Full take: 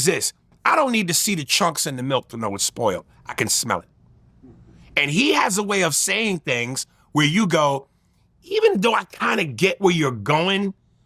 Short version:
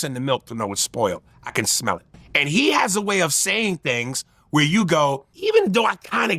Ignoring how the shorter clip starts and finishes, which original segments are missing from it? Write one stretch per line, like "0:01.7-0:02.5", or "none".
0:04.0-0:04.8
0:07.9-0:08.4